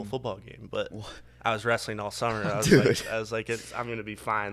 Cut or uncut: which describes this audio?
uncut